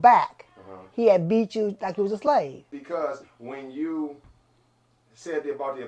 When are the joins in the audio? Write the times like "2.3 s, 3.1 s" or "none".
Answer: 2.8 s